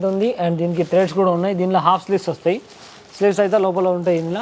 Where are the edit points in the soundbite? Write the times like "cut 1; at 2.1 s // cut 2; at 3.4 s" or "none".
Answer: none